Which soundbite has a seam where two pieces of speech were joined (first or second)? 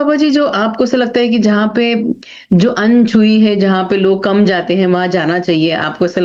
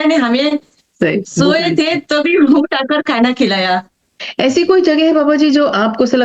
second